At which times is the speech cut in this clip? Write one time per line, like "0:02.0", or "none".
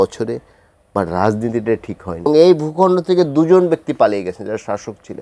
0:02.3